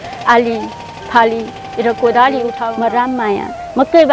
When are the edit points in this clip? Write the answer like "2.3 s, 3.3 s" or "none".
2.6 s